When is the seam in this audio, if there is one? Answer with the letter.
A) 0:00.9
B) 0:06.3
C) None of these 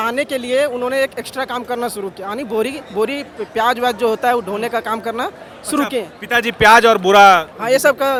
C